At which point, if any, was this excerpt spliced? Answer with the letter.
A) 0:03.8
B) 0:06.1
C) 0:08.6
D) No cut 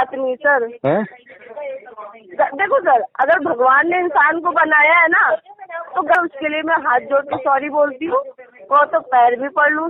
B